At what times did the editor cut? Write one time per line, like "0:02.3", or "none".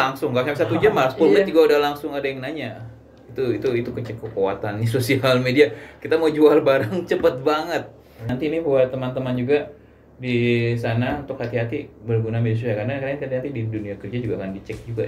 0:08.3